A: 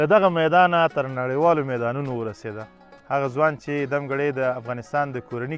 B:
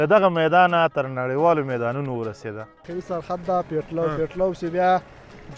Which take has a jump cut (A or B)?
B